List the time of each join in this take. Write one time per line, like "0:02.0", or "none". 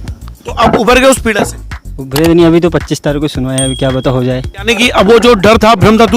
0:04.7